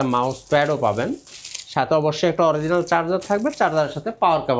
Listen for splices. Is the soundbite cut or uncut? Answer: uncut